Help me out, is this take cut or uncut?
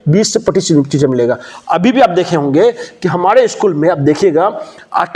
uncut